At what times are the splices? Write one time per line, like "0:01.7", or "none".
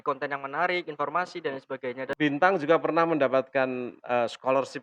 0:02.1